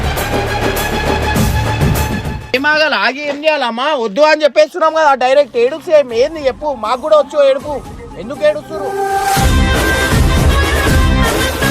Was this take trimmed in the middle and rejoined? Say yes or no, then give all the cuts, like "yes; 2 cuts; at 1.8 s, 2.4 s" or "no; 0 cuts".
yes; 1 cut; at 2.5 s